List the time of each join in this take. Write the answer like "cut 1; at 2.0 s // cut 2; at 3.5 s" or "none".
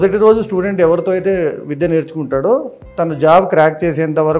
none